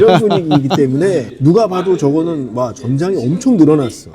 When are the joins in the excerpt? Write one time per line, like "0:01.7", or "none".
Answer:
0:01.2